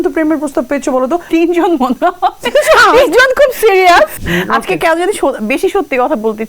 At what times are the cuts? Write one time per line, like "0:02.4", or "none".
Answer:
0:01.2
0:04.2